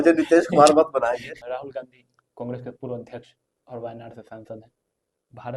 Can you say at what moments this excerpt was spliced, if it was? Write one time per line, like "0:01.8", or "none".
0:01.3